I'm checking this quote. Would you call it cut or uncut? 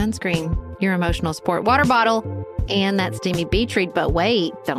uncut